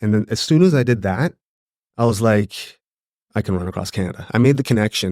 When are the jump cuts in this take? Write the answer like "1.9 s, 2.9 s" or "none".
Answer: none